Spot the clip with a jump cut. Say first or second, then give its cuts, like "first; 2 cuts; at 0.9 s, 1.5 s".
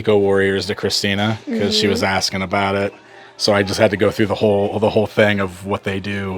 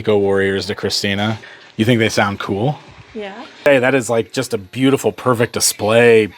second; 2 cuts; at 1.4 s, 3.6 s